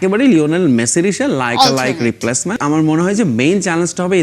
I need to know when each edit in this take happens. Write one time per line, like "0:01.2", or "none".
0:02.5